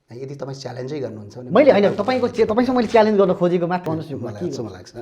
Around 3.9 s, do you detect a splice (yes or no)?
yes